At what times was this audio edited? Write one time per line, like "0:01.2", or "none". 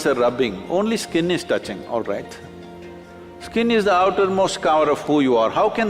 none